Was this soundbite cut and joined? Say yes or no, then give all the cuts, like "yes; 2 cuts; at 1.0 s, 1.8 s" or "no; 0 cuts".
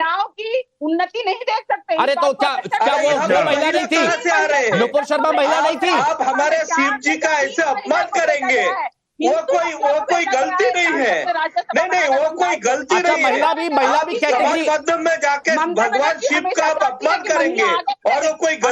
yes; 1 cut; at 12.1 s